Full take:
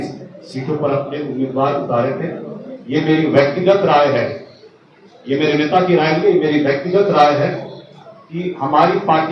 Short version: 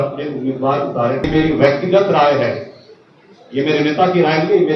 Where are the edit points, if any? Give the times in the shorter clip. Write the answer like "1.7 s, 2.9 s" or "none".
1.3 s